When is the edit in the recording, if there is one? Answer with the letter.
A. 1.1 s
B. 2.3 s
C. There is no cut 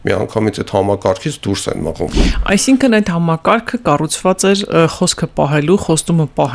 B